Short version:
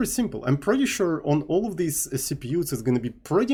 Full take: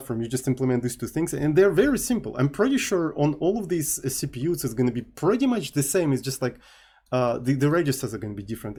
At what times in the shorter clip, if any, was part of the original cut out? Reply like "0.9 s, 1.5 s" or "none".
none